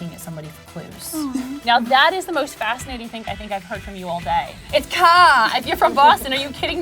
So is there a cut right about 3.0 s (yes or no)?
no